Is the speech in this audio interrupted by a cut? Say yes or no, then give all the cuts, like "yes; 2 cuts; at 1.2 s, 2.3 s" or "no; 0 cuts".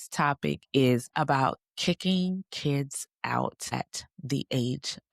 yes; 2 cuts; at 1.1 s, 3.7 s